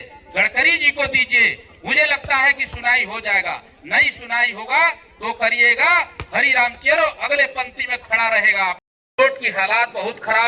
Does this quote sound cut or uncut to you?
cut